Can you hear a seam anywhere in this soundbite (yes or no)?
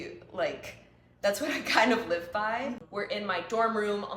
yes